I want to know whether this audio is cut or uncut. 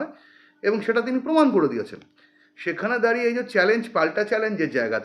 uncut